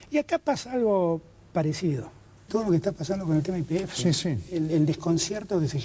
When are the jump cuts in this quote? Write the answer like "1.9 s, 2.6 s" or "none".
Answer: 2.3 s